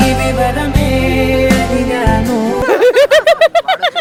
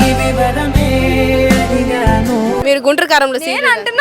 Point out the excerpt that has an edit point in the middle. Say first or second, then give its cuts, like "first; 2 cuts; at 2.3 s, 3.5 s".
second; 1 cut; at 2.6 s